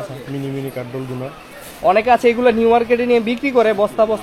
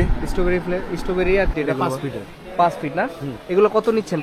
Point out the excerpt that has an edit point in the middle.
second; 1 cut; at 1.5 s

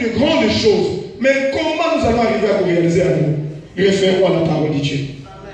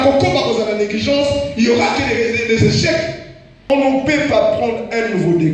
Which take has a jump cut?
second; 1 cut; at 3.7 s

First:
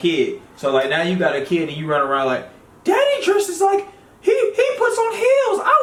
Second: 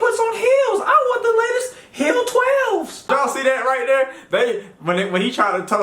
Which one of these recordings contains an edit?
second; 1 cut; at 3.1 s

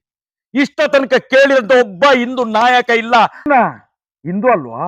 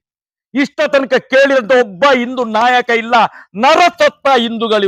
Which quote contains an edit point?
first; 1 cut; at 3.5 s

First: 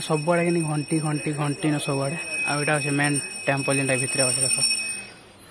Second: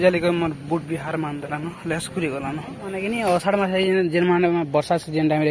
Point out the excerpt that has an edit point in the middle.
second; 1 cut; at 2.9 s

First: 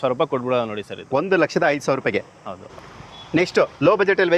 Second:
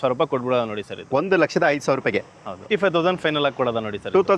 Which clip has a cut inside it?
second; 1 cut; at 2.7 s

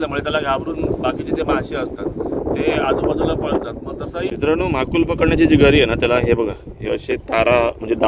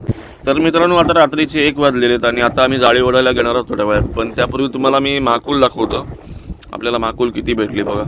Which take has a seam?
first; 1 cut; at 4.3 s

